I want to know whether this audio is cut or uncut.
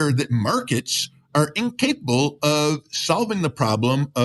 uncut